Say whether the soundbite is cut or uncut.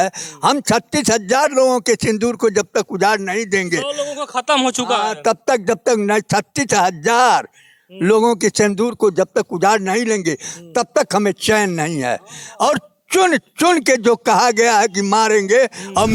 uncut